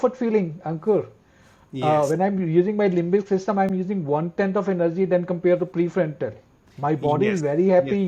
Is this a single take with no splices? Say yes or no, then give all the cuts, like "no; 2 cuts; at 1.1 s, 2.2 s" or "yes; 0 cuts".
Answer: yes; 0 cuts